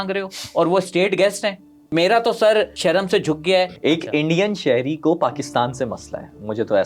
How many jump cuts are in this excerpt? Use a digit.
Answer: 3